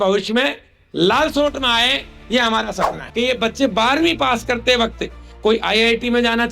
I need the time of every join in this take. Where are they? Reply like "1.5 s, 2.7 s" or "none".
3.0 s